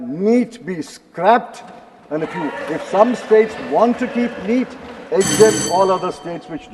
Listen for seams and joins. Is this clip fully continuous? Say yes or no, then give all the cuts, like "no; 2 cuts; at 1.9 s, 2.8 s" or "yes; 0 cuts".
yes; 0 cuts